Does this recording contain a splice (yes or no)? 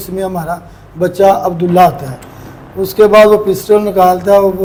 no